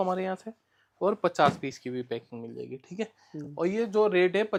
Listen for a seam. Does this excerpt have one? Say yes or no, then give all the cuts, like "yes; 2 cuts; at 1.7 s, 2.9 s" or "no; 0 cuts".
no; 0 cuts